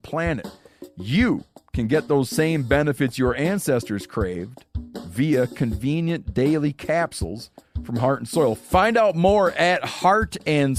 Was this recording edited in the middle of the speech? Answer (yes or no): no